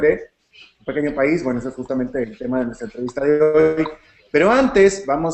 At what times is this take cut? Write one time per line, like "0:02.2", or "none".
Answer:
0:01.7